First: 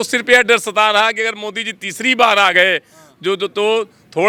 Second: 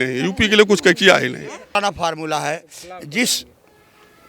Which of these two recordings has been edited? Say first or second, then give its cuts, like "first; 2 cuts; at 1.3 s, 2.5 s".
second; 1 cut; at 1.7 s